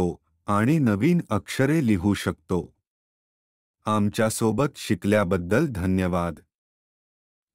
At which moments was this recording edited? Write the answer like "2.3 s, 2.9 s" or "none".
3.1 s